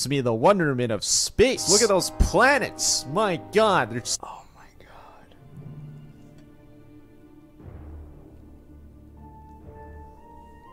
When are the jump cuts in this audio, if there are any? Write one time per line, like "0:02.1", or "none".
0:01.6
0:04.2